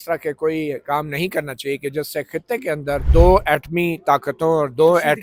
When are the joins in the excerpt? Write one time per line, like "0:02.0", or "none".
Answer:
none